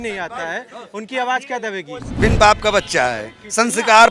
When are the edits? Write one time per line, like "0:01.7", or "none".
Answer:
0:02.0

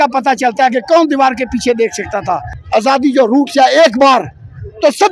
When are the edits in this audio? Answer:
0:02.5

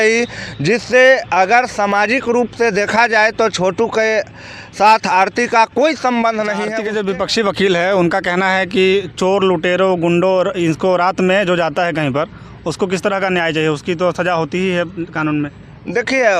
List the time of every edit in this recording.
0:06.7

